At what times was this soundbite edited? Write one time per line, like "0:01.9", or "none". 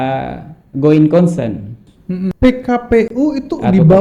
0:02.3